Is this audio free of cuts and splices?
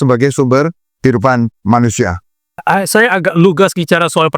no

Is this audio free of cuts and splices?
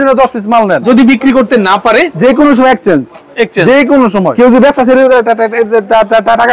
no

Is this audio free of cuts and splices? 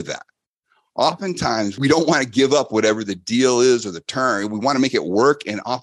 no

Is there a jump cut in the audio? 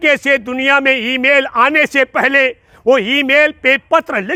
no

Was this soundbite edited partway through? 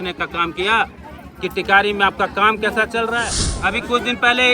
yes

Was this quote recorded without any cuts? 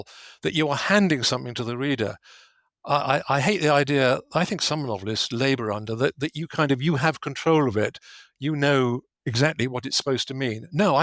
yes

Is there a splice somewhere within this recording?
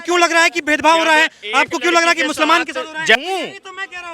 no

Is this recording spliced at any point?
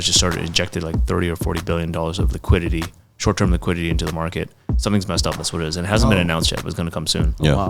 yes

